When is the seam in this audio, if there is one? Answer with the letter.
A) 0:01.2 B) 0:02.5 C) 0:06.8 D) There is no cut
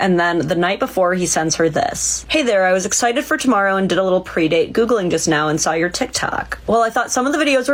D